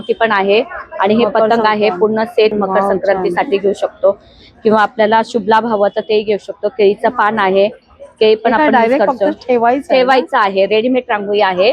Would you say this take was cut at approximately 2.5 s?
yes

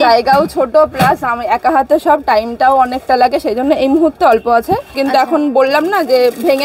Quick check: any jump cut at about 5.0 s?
yes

